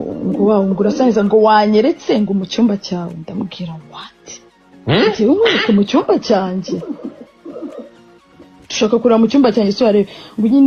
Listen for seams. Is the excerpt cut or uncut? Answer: uncut